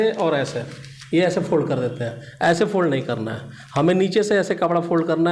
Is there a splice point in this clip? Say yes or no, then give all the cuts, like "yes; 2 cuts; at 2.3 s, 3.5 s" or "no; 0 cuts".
no; 0 cuts